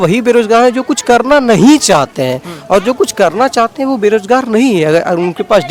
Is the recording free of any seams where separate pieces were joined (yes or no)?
yes